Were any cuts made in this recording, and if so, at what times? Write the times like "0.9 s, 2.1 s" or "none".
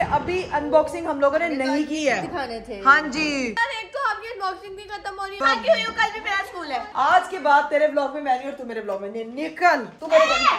3.6 s, 5.4 s, 6.9 s